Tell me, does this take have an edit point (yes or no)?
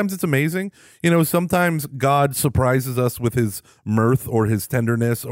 no